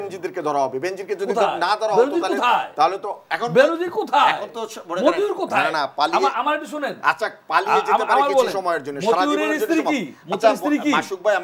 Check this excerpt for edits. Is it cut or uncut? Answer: uncut